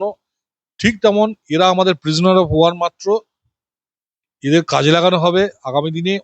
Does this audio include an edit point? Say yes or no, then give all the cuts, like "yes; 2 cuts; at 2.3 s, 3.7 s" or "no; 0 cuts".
no; 0 cuts